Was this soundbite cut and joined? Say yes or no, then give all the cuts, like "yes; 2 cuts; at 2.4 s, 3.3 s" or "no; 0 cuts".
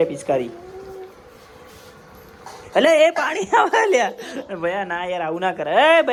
no; 0 cuts